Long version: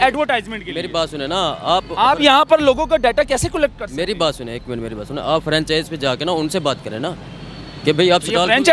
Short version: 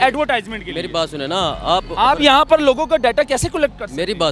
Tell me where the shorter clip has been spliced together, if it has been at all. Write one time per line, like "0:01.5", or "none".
none